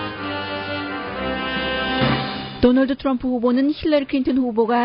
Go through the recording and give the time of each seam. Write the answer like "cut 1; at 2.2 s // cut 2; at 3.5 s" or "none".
none